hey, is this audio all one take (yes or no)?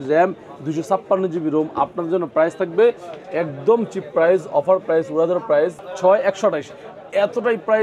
no